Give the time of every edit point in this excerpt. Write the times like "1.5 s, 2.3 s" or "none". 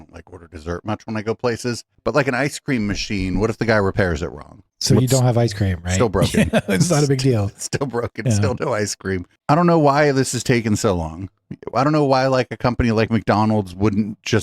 1.9 s, 9.3 s